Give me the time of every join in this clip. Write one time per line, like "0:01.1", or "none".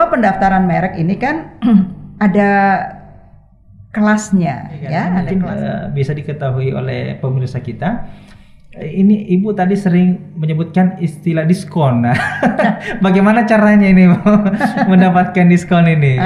0:05.1